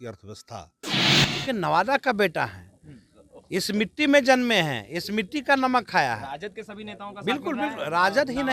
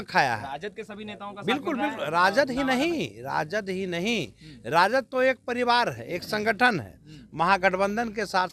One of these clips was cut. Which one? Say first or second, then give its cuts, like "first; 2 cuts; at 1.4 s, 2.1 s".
first; 1 cut; at 1.1 s